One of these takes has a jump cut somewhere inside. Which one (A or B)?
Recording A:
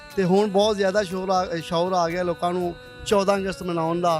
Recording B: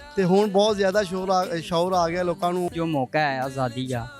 B